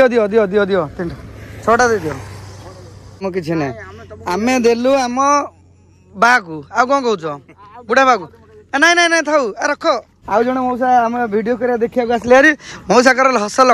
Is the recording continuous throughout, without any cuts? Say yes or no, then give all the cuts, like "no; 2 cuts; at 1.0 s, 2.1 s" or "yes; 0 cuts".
no; 2 cuts; at 3.2 s, 10.2 s